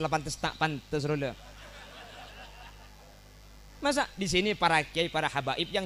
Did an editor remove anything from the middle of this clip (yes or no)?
no